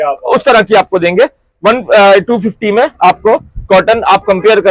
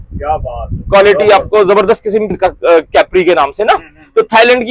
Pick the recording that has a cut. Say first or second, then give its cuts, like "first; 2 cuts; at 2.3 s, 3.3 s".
second; 1 cut; at 2.3 s